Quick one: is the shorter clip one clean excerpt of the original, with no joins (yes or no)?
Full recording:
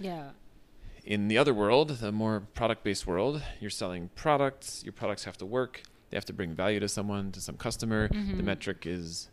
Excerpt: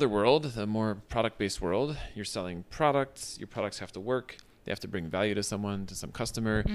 yes